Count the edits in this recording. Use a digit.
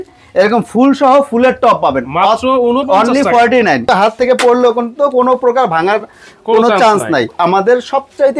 2